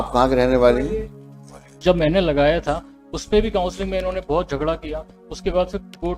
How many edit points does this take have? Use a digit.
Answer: 1